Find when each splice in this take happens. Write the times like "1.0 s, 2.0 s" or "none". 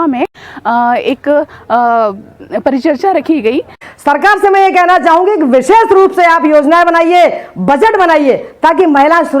3.8 s